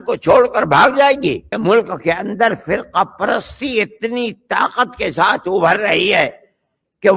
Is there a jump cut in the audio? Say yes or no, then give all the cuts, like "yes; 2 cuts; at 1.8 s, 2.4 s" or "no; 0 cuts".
yes; 1 cut; at 1.5 s